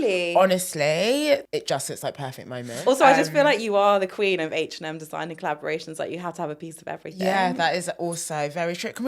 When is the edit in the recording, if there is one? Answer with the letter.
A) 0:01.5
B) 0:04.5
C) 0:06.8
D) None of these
A